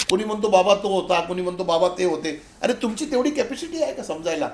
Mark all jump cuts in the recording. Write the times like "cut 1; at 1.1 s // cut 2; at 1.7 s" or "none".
none